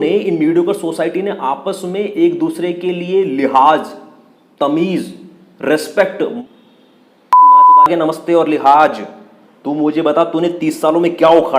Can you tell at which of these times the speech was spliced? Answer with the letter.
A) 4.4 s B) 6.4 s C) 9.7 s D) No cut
B